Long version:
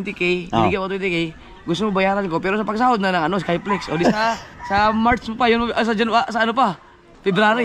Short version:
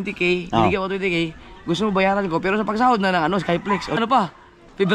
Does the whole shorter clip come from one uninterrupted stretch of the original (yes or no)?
no